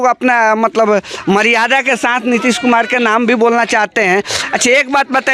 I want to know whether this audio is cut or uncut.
uncut